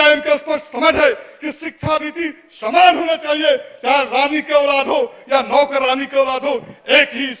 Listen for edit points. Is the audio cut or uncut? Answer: uncut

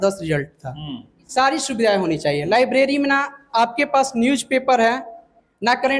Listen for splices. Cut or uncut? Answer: cut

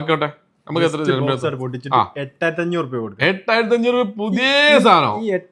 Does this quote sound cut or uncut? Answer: uncut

